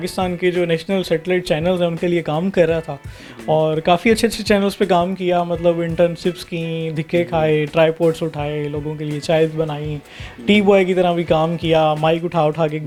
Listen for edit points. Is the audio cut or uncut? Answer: uncut